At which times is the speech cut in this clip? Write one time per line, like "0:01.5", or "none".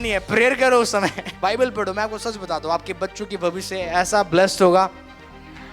0:01.3